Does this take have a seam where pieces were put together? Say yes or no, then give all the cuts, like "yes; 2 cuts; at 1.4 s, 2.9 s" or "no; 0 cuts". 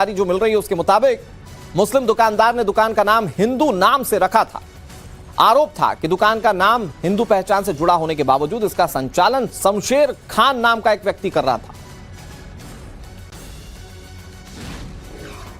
yes; 1 cut; at 14.6 s